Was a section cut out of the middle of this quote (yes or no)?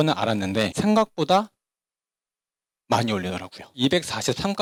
no